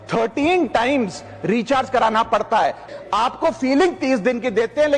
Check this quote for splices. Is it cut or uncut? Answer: cut